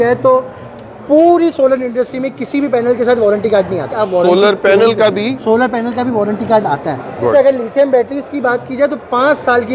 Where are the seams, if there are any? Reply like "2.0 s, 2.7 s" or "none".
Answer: 3.9 s, 7.3 s